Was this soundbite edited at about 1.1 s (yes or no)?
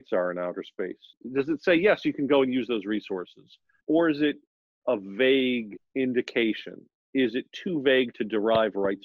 yes